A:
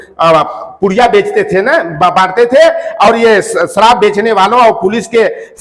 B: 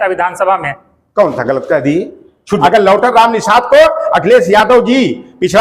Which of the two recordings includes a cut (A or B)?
B